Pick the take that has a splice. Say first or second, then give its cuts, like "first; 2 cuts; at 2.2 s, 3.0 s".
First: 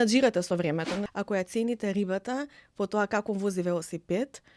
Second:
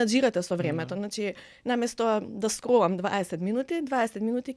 first; 1 cut; at 1.1 s